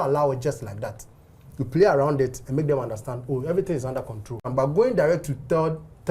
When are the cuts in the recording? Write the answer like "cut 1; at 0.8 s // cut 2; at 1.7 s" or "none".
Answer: cut 1; at 4.5 s